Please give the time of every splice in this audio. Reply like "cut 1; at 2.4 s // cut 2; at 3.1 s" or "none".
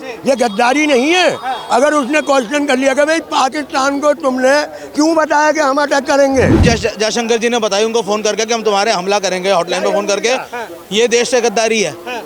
cut 1; at 6.6 s